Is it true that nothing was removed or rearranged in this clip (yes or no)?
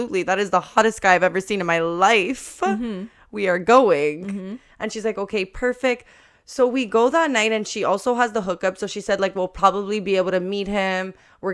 yes